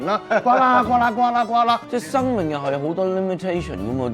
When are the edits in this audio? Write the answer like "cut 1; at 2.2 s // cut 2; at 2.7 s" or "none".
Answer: cut 1; at 1.8 s